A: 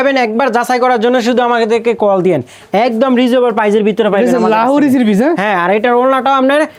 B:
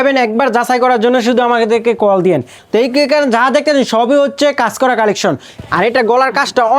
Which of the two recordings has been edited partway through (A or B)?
B